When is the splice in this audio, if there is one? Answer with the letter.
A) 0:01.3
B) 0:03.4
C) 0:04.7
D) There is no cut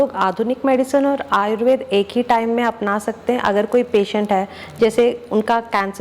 D